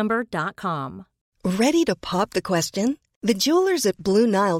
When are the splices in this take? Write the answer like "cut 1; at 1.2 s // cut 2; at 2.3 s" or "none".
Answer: cut 1; at 1.2 s